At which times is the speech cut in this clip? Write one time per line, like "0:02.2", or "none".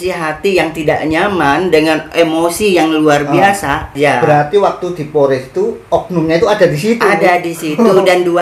0:03.9